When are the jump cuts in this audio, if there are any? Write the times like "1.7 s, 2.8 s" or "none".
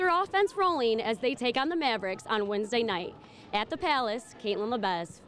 none